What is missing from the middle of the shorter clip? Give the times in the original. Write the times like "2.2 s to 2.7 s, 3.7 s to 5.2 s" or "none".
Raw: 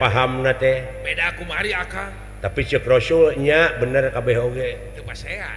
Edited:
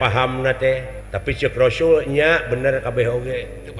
1.0 s to 2.3 s